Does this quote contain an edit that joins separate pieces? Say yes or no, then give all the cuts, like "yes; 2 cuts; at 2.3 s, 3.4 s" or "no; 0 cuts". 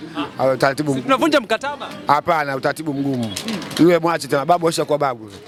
no; 0 cuts